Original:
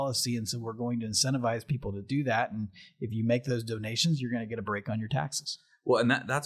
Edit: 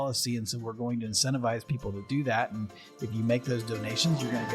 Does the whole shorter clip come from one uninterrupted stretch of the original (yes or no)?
yes